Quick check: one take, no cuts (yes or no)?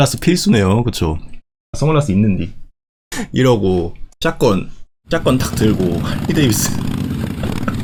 yes